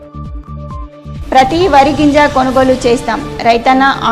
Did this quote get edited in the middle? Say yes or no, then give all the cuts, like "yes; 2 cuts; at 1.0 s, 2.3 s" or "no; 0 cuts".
yes; 1 cut; at 1.2 s